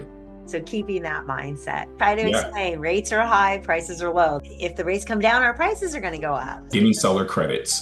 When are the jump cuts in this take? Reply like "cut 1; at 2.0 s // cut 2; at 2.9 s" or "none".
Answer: cut 1; at 1.9 s // cut 2; at 4.5 s // cut 3; at 6.7 s